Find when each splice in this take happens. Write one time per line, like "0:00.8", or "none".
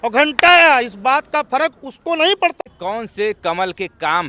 0:02.5